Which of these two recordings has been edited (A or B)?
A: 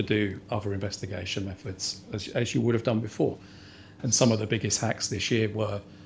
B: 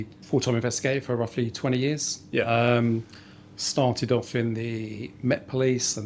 A